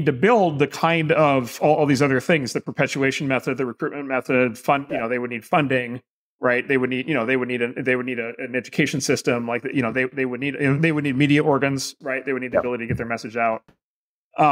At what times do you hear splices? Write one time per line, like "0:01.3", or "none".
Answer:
none